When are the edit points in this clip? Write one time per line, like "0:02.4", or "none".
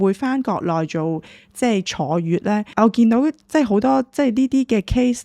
0:02.7

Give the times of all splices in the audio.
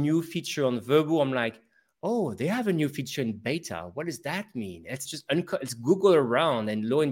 0:05.1

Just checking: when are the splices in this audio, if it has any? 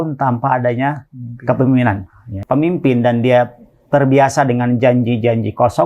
0:02.3

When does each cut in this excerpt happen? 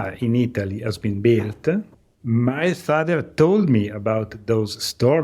0:02.2

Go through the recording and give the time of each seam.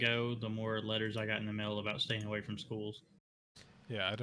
0:03.1

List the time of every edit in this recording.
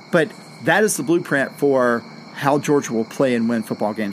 none

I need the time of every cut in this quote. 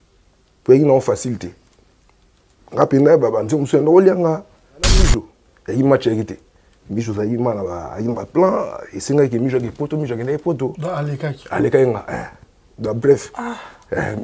0:05.0

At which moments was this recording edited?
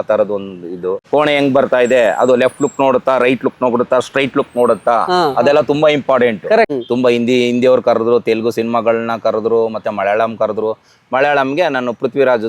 0:01.0
0:06.7

